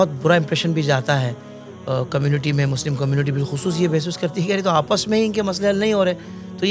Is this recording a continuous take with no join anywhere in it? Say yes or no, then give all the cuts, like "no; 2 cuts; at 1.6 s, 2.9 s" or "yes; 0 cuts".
yes; 0 cuts